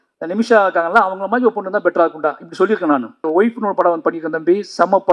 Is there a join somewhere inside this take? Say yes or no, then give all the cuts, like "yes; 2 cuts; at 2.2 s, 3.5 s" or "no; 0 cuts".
yes; 1 cut; at 3.3 s